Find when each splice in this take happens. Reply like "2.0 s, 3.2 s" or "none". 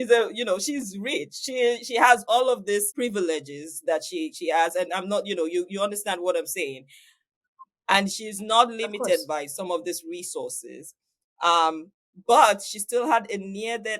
2.9 s